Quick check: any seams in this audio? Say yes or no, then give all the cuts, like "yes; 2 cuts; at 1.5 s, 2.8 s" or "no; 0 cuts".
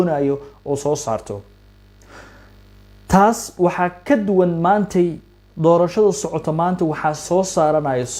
no; 0 cuts